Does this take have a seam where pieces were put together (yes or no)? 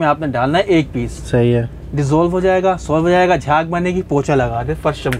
no